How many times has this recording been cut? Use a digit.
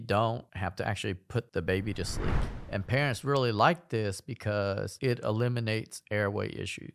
1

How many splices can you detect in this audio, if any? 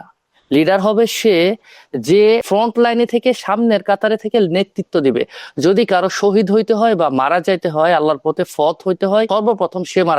2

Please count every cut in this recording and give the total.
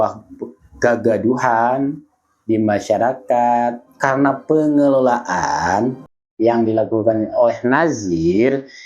1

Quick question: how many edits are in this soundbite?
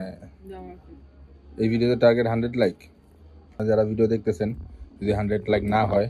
1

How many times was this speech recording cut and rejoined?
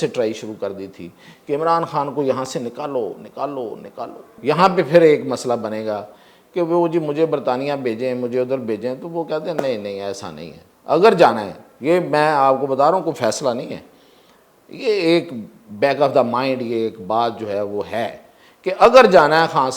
1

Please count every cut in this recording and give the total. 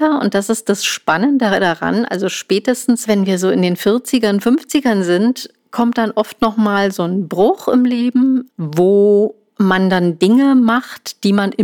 3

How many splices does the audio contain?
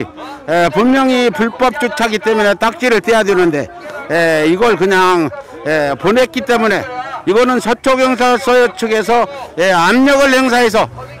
0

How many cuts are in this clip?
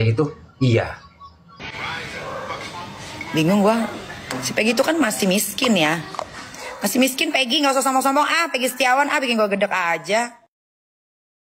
1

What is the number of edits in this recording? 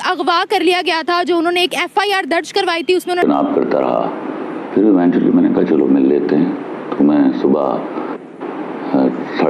1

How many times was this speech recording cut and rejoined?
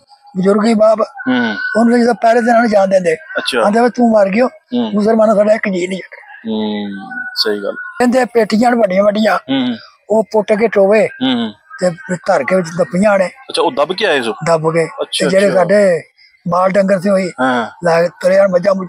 1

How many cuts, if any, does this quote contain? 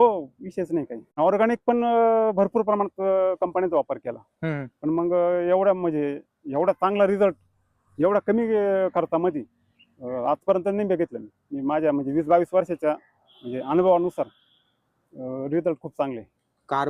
1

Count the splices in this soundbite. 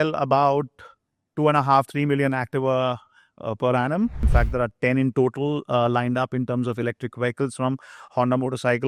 1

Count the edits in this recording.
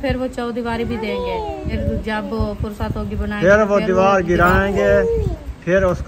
1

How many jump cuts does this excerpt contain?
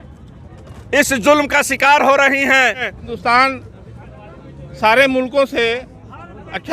1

